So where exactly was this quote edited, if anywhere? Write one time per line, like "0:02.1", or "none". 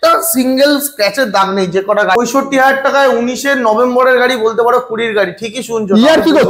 0:02.1